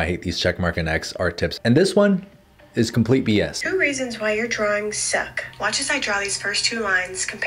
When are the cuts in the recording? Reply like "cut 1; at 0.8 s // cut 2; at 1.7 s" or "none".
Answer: cut 1; at 1.6 s // cut 2; at 3.6 s